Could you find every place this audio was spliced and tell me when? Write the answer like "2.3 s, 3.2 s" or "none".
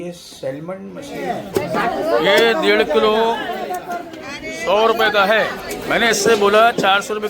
1.5 s, 5.7 s